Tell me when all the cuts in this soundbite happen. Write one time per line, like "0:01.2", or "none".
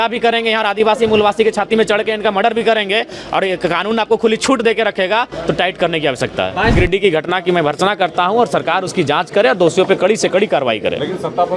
0:06.7